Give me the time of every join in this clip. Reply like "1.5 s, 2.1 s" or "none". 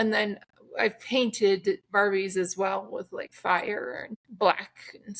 3.2 s, 4.2 s

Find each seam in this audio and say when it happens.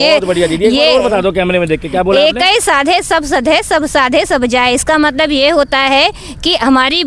none

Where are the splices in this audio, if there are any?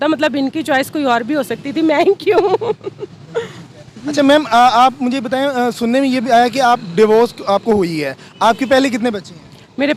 none

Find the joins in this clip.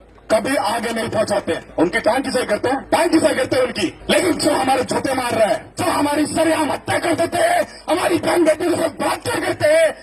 1.7 s, 2.8 s, 4.0 s, 5.7 s

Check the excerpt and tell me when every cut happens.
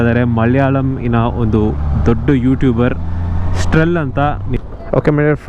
4.5 s

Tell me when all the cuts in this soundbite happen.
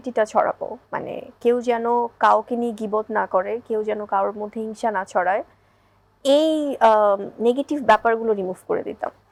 none

